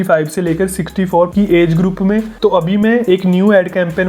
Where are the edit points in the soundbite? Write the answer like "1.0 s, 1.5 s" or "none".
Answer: none